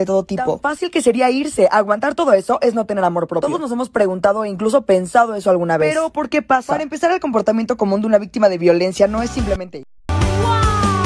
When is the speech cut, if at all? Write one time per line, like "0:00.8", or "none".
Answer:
0:09.7